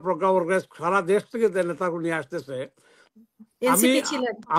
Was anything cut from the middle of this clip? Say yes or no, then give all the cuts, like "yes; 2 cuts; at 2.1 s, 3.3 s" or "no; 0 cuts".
yes; 1 cut; at 3.1 s